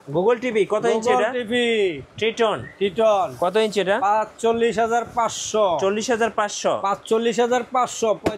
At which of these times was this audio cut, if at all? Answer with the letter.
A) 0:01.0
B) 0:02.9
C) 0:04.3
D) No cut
D